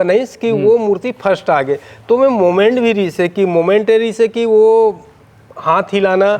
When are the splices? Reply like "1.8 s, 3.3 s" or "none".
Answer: none